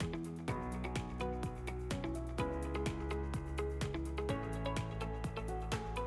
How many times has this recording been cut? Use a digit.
0